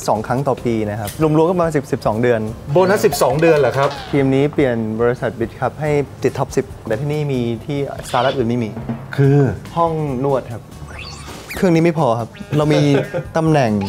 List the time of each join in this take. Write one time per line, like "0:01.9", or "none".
0:01.1
0:04.0
0:06.9
0:11.4